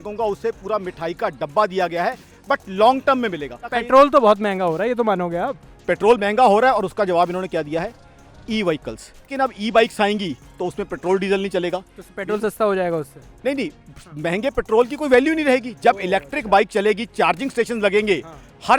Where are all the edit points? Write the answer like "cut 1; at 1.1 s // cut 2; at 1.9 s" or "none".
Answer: cut 1; at 3.7 s // cut 2; at 9.3 s

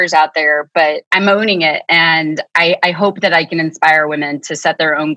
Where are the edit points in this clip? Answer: cut 1; at 1.0 s

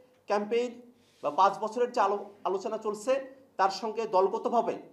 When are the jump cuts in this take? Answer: none

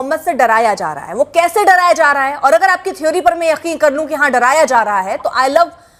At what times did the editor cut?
none

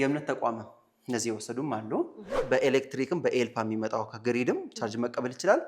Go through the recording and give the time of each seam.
cut 1; at 2.3 s

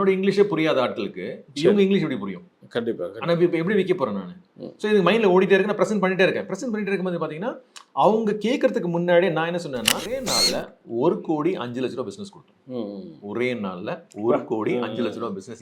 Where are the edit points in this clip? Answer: cut 1; at 10.3 s

